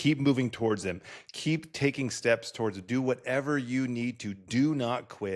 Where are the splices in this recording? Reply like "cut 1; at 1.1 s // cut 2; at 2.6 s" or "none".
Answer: none